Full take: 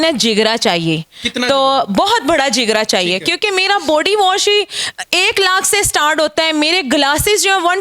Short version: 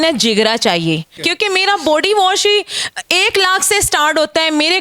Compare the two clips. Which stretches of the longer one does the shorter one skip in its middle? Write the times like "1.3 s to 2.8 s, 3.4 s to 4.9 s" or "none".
1.2 s to 3.2 s